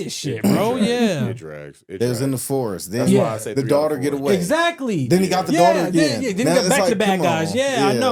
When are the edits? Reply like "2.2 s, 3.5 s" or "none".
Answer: none

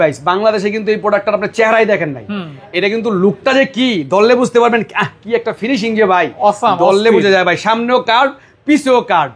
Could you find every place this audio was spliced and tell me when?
none

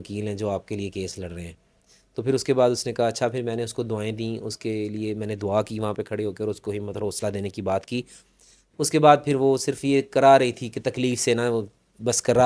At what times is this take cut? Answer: none

